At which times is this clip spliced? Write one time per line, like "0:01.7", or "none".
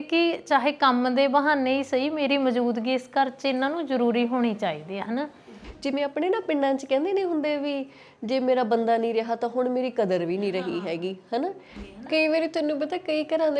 0:05.5
0:11.9